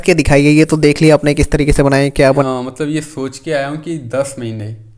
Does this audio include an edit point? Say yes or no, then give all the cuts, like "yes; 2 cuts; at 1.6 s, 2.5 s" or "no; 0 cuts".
yes; 1 cut; at 2.4 s